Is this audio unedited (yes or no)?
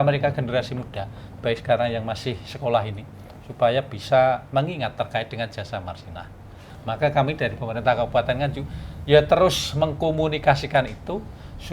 no